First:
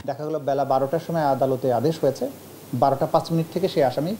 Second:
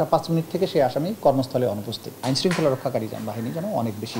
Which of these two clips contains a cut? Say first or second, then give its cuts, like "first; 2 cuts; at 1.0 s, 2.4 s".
second; 1 cut; at 2.1 s